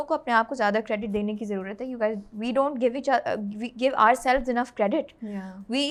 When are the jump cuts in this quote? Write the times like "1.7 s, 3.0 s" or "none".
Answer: none